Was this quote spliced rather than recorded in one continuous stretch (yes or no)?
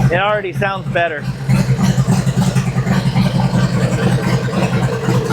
no